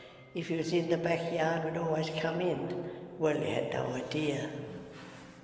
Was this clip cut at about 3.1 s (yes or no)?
no